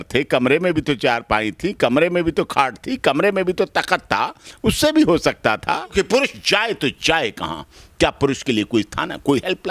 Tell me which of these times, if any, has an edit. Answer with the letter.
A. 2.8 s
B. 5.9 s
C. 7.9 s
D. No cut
B